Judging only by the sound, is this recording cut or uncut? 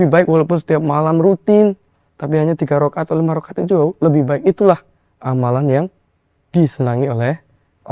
uncut